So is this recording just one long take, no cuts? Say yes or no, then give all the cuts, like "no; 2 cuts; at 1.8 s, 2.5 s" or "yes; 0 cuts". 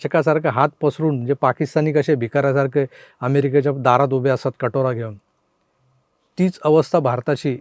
yes; 0 cuts